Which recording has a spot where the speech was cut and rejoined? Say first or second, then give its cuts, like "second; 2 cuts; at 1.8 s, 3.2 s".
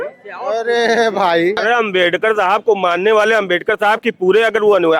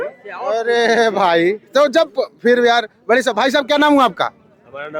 first; 1 cut; at 1.6 s